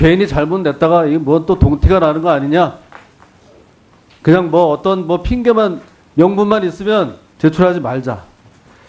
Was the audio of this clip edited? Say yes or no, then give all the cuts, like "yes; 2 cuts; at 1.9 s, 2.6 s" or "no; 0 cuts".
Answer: yes; 1 cut; at 7.5 s